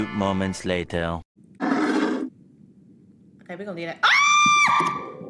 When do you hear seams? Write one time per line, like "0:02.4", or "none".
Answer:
0:01.6